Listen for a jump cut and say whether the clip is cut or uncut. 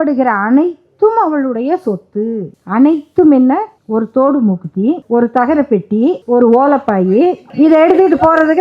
cut